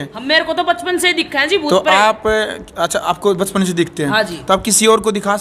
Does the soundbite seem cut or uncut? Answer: uncut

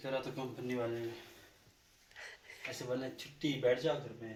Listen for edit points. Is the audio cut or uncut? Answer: uncut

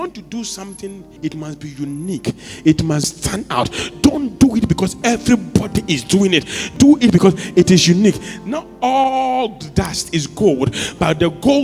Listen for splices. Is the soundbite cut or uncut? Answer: cut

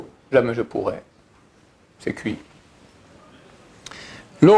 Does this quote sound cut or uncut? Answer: uncut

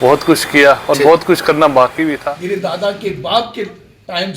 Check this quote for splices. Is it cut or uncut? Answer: cut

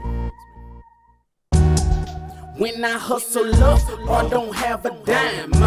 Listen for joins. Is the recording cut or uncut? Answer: uncut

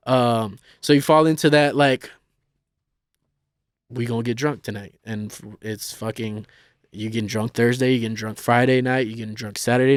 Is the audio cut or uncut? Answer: uncut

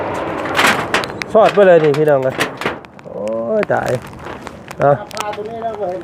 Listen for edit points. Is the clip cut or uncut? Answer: uncut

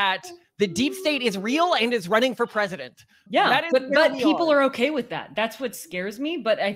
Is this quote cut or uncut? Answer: uncut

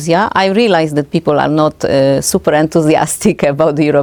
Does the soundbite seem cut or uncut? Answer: uncut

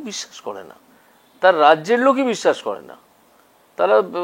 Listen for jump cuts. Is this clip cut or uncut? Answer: uncut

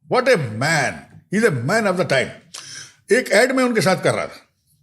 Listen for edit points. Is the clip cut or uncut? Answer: uncut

